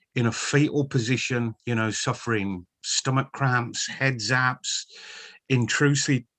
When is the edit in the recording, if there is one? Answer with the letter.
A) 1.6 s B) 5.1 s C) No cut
A